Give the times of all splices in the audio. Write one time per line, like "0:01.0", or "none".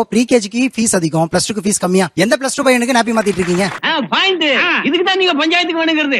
0:02.1